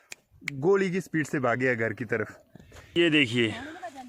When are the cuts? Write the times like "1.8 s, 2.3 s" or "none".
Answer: 3.0 s